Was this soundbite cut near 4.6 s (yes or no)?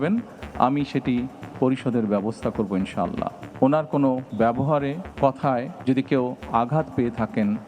yes